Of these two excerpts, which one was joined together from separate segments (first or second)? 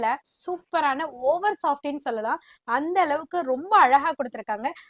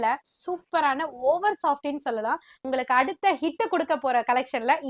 second